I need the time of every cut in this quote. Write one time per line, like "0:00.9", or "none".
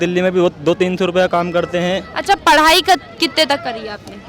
none

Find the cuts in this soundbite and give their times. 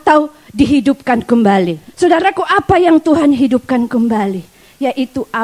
0:01.8

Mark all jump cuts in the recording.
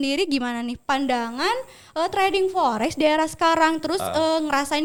none

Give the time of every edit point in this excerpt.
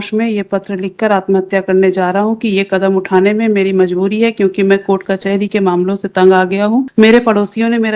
0:06.9

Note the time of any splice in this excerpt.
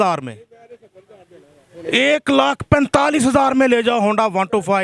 none

